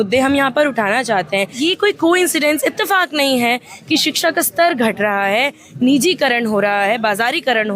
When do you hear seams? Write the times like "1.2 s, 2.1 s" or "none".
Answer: 1.6 s